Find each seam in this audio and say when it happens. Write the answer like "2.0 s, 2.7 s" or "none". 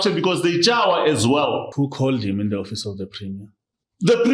1.7 s